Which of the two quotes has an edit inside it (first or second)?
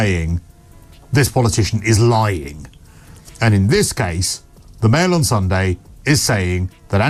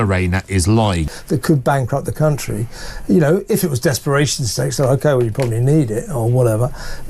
second